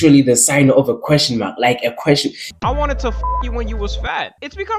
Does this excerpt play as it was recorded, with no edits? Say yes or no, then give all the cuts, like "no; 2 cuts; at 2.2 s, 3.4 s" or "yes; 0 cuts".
no; 1 cut; at 2.5 s